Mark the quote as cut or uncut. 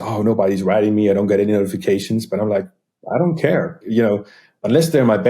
cut